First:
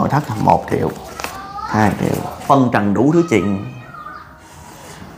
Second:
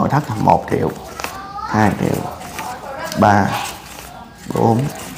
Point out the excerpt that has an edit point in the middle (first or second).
first